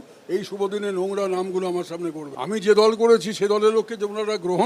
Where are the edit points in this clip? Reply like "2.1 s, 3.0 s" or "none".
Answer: 2.3 s